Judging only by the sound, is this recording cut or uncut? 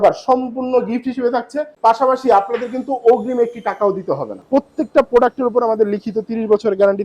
cut